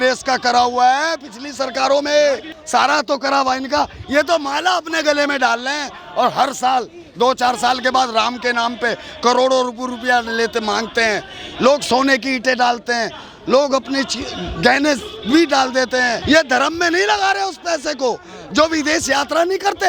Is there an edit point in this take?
yes; 2 cuts; at 2.5 s, 16.2 s

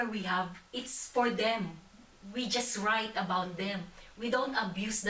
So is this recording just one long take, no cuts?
yes; 0 cuts

